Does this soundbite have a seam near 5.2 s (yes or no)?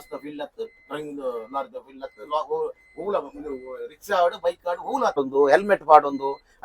yes